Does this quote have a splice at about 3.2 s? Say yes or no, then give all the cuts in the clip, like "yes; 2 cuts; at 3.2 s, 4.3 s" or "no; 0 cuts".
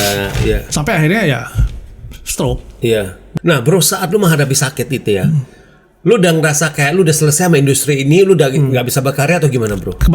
yes; 1 cut; at 3.2 s